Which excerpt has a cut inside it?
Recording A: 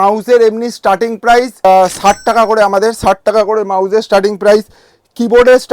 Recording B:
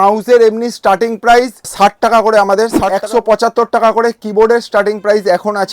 B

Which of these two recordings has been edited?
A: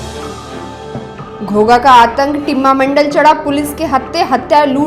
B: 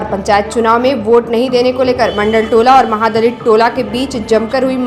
A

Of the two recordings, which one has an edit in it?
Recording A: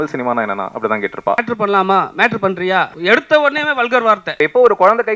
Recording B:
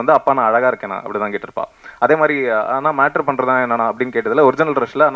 A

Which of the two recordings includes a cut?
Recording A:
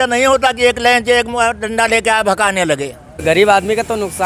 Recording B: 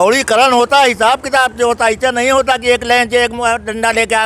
A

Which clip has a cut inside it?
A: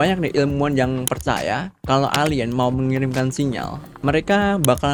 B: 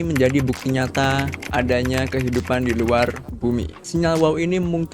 B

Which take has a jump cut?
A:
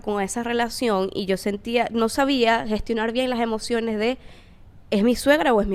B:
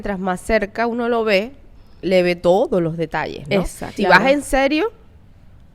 B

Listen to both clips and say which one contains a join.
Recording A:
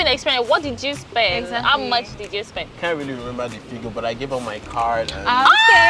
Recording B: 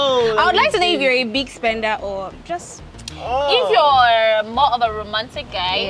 A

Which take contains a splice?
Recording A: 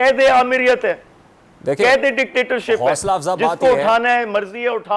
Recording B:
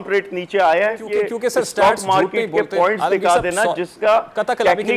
B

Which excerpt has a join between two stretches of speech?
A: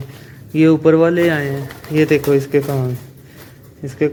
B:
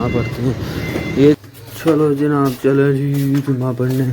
B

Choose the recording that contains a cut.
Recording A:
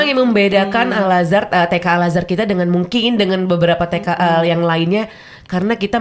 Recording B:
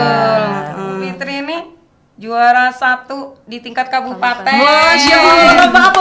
B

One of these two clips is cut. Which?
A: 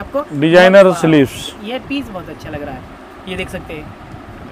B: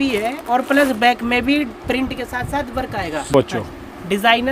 B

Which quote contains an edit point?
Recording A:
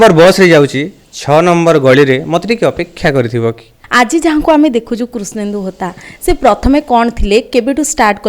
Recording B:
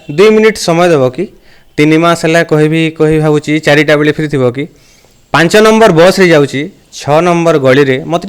A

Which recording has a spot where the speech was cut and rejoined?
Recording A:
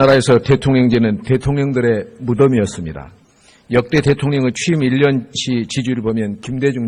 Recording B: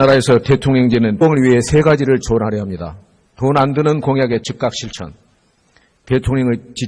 A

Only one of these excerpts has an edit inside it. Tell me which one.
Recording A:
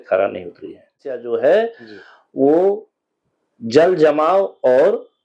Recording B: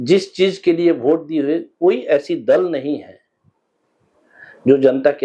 A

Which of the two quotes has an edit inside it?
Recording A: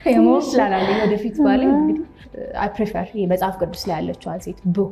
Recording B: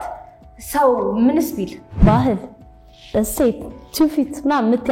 B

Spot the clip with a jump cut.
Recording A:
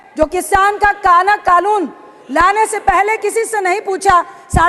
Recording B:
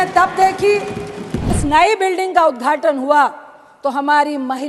B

